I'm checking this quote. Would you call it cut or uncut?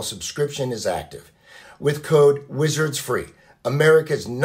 cut